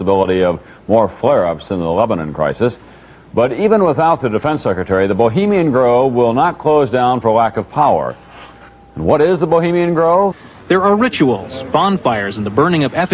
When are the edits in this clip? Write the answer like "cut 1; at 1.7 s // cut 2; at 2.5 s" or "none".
cut 1; at 10.5 s